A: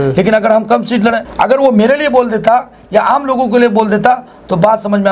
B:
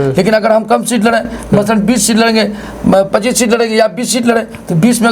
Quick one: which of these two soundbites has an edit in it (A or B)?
A